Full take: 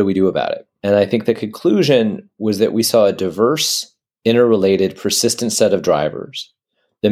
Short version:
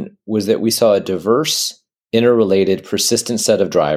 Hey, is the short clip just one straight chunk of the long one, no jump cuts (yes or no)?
yes